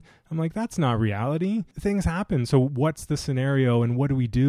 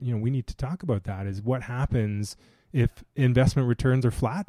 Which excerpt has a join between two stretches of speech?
first; 1 cut; at 1.7 s

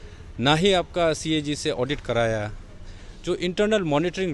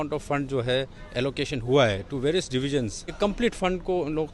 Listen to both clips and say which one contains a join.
second; 1 cut; at 3.1 s

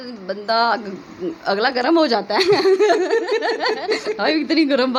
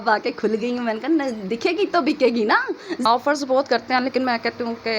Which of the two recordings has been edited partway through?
second; 1 cut; at 3.0 s

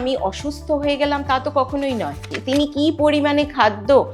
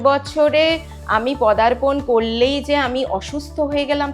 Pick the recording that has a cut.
first; 1 cut; at 2.3 s

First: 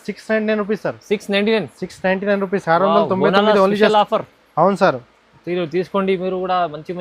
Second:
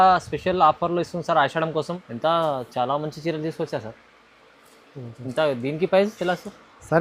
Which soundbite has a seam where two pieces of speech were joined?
second; 1 cut; at 2.0 s

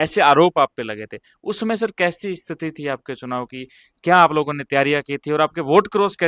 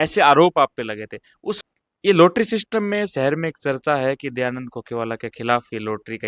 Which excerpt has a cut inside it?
second; 1 cut; at 1.6 s

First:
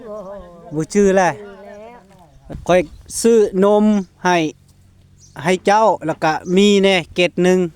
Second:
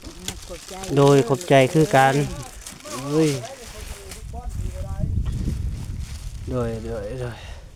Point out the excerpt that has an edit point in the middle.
first; 1 cut; at 2.4 s

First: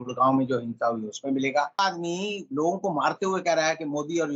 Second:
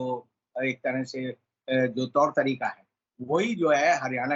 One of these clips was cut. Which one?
first; 1 cut; at 1.8 s

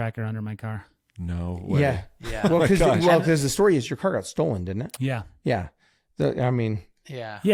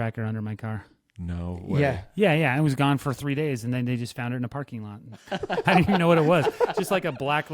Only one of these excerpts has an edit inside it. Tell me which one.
second; 2 cuts; at 2.0 s, 5.3 s

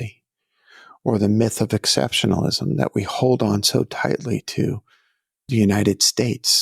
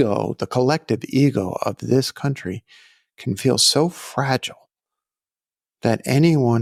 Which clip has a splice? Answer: first; 1 cut; at 5.5 s

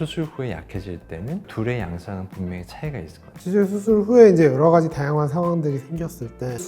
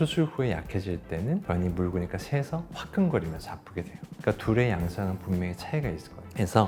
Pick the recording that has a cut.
first; 2 cuts; at 1.5 s, 3.2 s

